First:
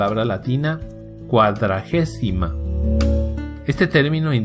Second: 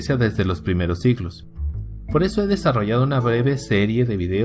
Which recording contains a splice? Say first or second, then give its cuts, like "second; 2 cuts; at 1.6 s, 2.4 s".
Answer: first; 1 cut; at 2.8 s